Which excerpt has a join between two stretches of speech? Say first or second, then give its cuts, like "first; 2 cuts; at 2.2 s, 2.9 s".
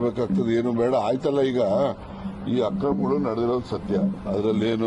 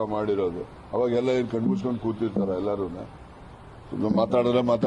second; 1 cut; at 2.2 s